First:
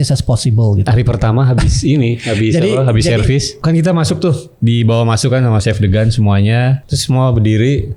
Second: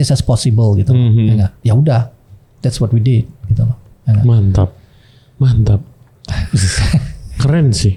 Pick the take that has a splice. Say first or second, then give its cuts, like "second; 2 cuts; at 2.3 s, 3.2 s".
first; 3 cuts; at 0.9 s, 3.6 s, 6.8 s